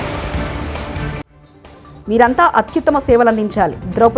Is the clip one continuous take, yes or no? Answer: yes